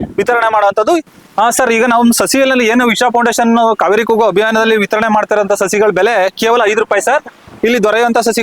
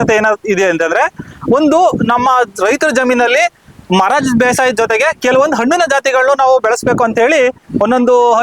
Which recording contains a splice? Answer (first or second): first